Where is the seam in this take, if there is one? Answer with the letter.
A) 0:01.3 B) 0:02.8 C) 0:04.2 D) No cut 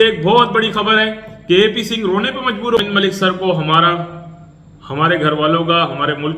B